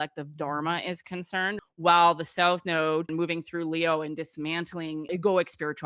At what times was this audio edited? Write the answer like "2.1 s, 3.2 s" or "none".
1.6 s, 3.1 s, 5.0 s